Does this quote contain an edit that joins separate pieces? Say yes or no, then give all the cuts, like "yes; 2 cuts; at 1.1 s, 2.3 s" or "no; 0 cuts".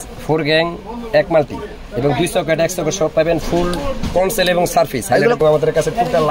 yes; 1 cut; at 5.4 s